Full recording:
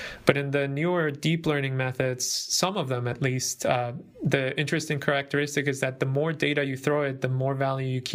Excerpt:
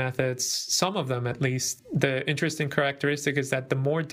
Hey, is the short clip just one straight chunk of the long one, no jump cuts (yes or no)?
no